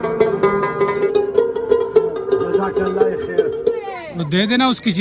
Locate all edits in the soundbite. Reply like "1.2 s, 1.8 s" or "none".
3.9 s